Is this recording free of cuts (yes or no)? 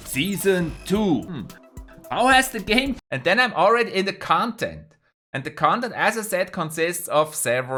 yes